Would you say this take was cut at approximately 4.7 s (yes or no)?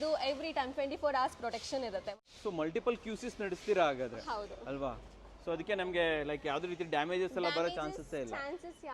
no